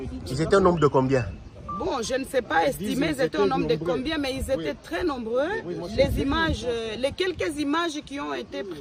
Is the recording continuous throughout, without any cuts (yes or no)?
yes